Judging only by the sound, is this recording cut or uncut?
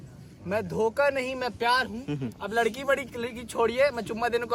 uncut